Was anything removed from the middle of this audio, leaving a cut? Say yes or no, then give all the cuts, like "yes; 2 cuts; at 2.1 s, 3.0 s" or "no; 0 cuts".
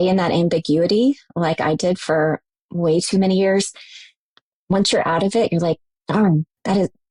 no; 0 cuts